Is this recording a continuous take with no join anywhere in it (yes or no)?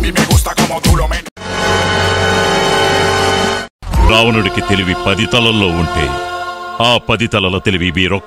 yes